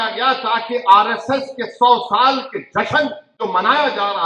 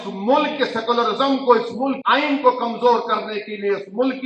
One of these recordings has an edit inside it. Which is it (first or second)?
second